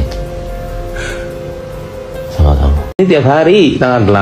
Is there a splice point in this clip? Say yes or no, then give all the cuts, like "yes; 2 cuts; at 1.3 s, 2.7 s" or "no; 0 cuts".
yes; 1 cut; at 3.0 s